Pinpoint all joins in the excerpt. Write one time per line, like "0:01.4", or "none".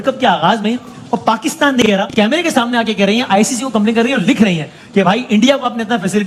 none